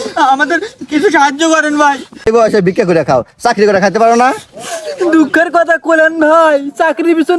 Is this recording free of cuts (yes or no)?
no